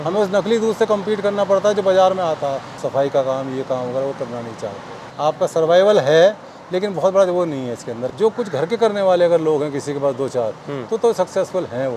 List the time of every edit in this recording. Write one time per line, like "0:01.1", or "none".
0:02.7
0:05.0
0:08.0